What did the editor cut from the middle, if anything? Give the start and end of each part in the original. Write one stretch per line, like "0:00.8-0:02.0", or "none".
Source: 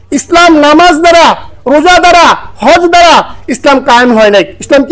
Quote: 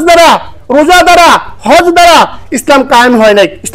none